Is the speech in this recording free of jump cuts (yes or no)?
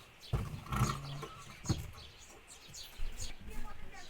no